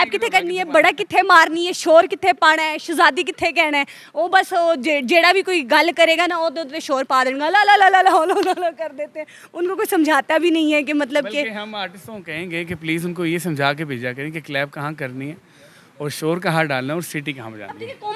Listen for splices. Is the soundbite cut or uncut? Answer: uncut